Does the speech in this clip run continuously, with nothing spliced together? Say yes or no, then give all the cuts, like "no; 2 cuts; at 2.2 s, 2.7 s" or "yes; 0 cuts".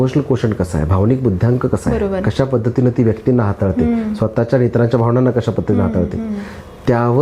yes; 0 cuts